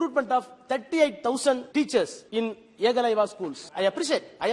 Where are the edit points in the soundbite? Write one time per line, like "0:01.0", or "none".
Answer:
0:01.6
0:02.2
0:03.6